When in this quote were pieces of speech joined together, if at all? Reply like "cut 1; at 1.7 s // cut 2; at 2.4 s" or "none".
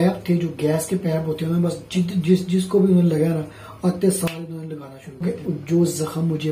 cut 1; at 5.2 s